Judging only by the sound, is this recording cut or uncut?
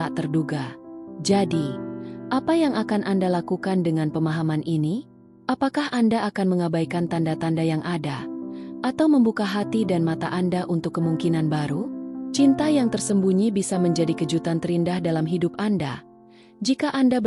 uncut